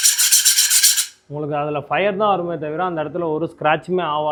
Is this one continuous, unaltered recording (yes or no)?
yes